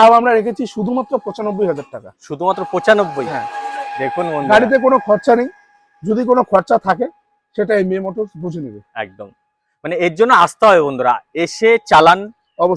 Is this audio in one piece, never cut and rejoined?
yes; 0 cuts

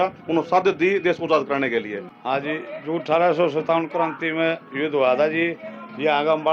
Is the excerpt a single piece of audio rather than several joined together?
no; 1 cut; at 2.1 s

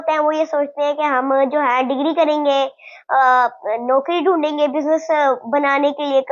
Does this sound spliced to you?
no; 0 cuts

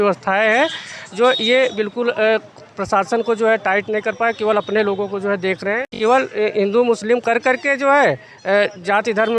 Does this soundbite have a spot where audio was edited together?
yes; 1 cut; at 5.8 s

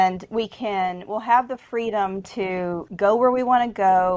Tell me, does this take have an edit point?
yes; 1 cut; at 2.8 s

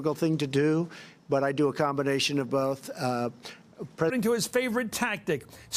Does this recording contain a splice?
no; 0 cuts

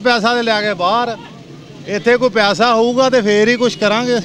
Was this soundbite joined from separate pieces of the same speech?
no; 0 cuts

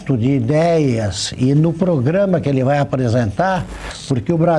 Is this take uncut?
yes; 0 cuts

